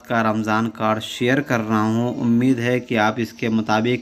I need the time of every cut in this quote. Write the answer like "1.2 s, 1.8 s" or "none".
none